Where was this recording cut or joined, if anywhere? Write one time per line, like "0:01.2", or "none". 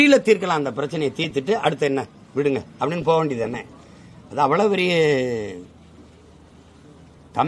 none